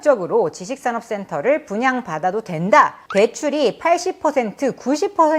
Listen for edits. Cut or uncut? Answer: cut